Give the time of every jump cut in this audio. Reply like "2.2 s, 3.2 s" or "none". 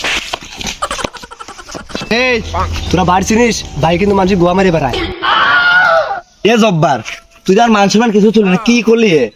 2.1 s